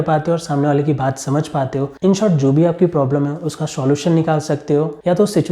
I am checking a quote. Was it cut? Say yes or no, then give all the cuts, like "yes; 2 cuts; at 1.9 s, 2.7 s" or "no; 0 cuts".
yes; 1 cut; at 1.9 s